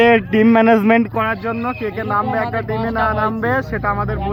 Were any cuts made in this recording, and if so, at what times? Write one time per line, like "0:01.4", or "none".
none